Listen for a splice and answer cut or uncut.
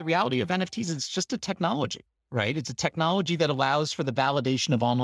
uncut